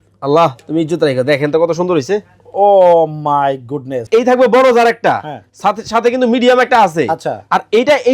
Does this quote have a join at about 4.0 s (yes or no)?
yes